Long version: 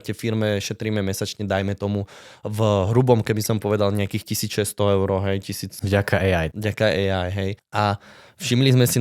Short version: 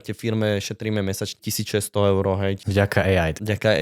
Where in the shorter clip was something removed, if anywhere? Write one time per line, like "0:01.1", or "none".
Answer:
0:01.4
0:02.6

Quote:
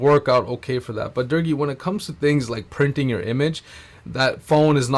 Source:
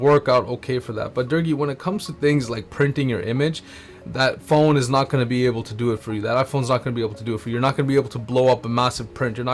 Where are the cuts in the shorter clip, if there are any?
none

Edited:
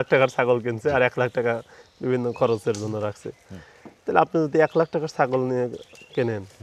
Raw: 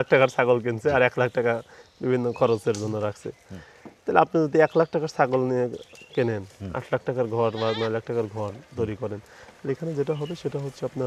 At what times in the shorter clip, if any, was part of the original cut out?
none

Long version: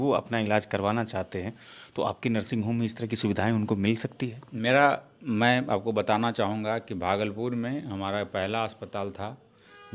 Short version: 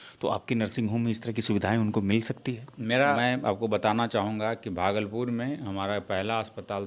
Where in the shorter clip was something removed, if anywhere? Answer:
0:03.2

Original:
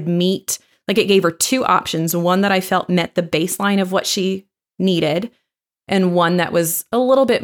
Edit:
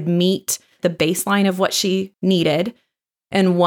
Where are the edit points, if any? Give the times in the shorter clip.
0:00.8
0:02.1

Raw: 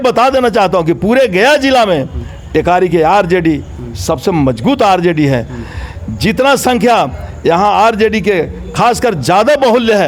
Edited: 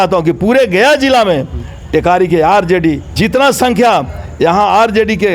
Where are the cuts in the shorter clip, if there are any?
0:03.1

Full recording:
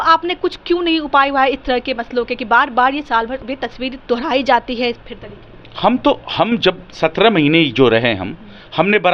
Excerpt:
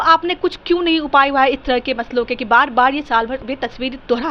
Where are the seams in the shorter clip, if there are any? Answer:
none

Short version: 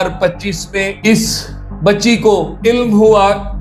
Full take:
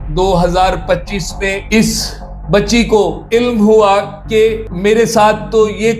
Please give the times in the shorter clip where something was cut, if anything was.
none

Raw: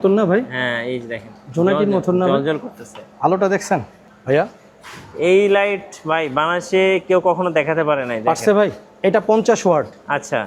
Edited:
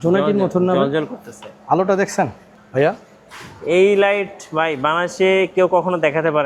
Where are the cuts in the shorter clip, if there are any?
none

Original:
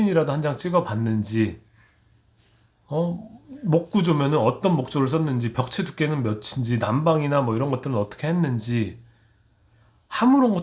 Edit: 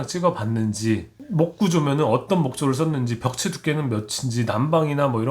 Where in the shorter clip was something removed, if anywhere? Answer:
0:01.2

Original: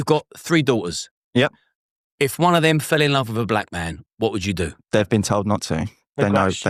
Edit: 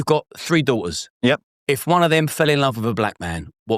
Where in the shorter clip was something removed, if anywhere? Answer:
0:01.1

